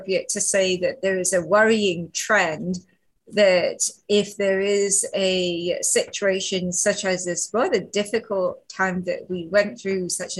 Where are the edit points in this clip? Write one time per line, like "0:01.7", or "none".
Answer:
none